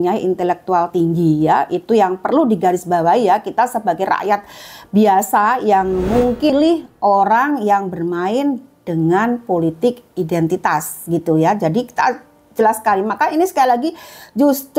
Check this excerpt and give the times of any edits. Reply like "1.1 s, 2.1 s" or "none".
6.5 s